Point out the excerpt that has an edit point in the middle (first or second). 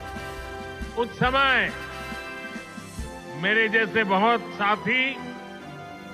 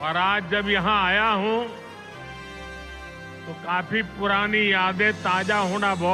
first